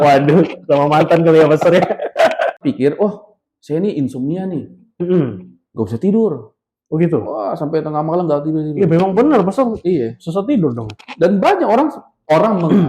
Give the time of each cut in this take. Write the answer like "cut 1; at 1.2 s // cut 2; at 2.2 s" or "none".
cut 1; at 2.6 s